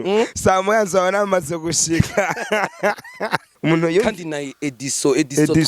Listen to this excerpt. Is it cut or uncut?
cut